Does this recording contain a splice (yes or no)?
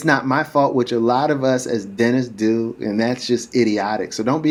no